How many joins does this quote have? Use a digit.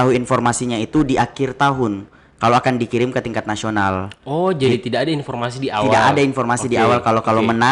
0